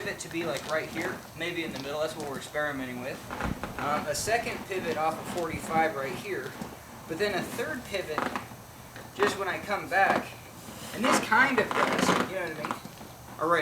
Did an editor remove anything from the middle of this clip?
no; 0 cuts

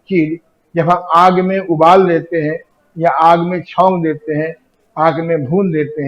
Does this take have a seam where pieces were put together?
no; 0 cuts

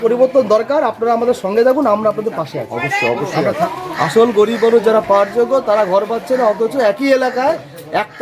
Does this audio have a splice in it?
yes; 1 cut; at 3.6 s

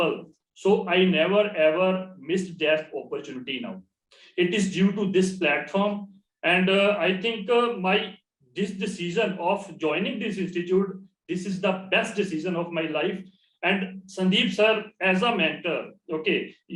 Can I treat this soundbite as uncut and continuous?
yes; 0 cuts

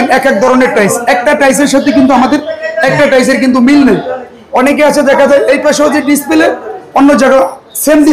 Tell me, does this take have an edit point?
no; 0 cuts

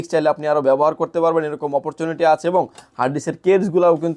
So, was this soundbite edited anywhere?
no; 0 cuts

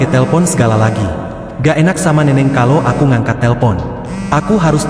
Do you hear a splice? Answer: no; 0 cuts

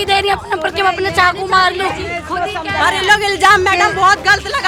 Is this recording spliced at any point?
no; 0 cuts

